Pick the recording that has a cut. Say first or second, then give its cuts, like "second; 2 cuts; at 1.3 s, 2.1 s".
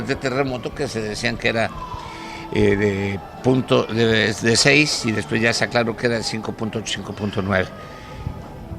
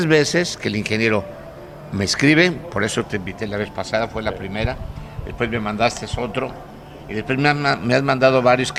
first; 1 cut; at 5.0 s